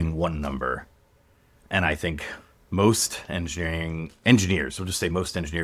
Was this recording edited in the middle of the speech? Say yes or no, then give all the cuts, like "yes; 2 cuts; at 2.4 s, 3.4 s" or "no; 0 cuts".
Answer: no; 0 cuts